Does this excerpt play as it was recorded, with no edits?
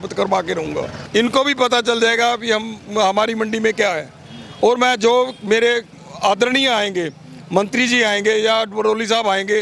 no; 1 cut; at 1.0 s

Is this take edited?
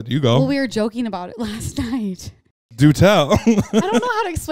yes; 2 cuts; at 2.8 s, 3.7 s

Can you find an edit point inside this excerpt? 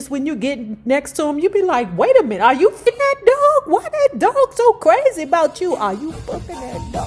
yes; 1 cut; at 2.9 s

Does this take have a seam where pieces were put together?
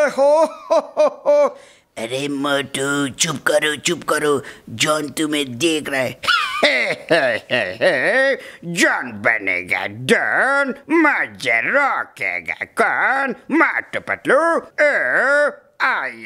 yes; 2 cuts; at 10.8 s, 14.7 s

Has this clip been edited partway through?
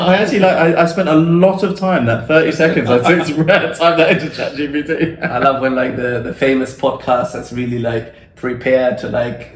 no; 0 cuts

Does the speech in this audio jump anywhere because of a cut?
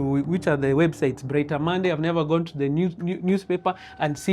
no; 0 cuts

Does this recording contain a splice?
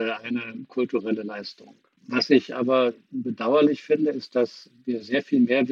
no; 0 cuts

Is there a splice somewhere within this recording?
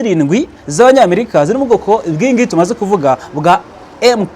no; 0 cuts

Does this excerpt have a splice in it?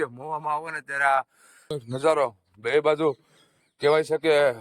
yes; 1 cut; at 1.8 s

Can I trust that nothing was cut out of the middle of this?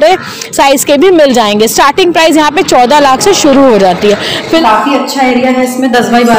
no; 1 cut; at 4.6 s

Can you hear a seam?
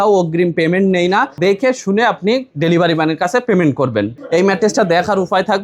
yes; 2 cuts; at 1.3 s, 4.2 s

